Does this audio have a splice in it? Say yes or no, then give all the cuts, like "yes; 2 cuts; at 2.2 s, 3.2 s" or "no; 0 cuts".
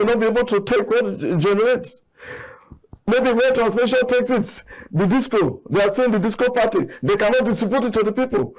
no; 0 cuts